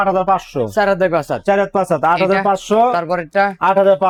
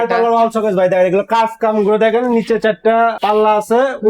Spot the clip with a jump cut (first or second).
second